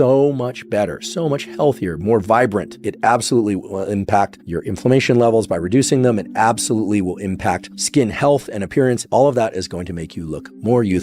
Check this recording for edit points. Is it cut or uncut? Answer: cut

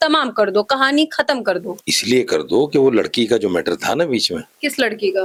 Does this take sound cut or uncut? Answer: uncut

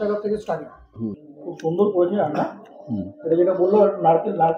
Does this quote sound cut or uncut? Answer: cut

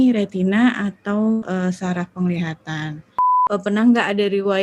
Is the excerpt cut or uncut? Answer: cut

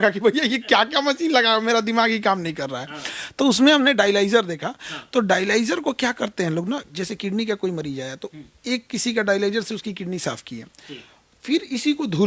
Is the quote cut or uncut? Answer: uncut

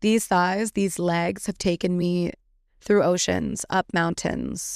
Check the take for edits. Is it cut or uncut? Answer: uncut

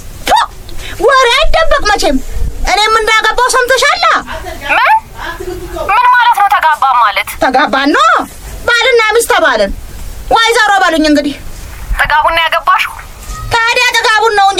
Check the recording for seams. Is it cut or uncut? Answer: uncut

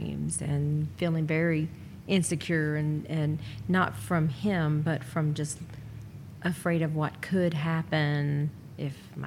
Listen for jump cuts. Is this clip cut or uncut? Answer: uncut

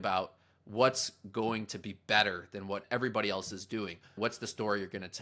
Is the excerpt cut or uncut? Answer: cut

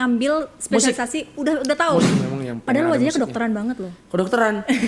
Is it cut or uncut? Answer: cut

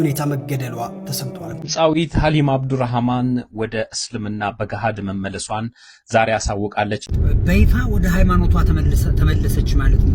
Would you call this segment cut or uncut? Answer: cut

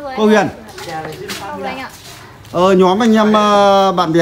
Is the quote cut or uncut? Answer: uncut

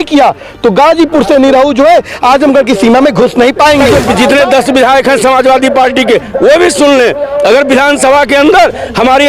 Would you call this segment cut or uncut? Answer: cut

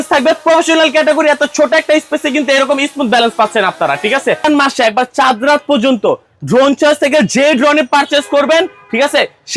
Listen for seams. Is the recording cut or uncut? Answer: cut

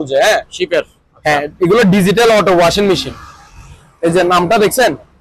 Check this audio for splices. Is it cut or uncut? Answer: uncut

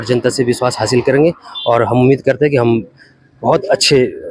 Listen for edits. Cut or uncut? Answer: uncut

